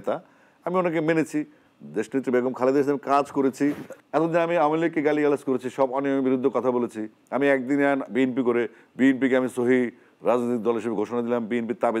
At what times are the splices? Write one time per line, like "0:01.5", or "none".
0:03.9